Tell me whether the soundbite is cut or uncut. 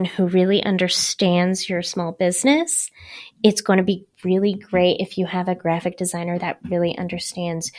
uncut